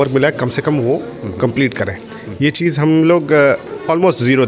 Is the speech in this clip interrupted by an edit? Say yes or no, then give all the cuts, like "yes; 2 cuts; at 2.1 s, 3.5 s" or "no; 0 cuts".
no; 0 cuts